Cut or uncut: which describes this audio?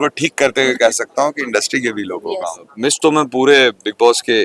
cut